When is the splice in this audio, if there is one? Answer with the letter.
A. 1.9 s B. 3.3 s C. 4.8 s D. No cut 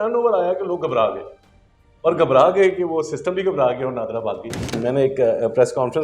C